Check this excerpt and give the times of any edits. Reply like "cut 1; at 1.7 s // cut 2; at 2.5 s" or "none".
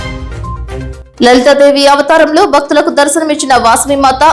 cut 1; at 1.0 s